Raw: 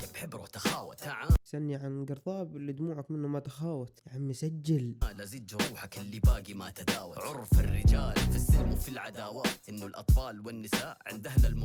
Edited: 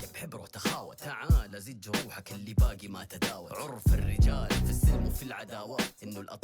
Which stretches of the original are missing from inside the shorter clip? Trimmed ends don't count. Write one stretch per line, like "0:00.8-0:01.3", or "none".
0:01.4-0:05.1